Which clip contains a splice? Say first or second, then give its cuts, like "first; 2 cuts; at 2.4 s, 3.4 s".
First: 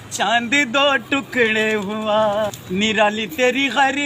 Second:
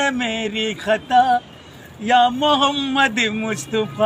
first; 1 cut; at 2.6 s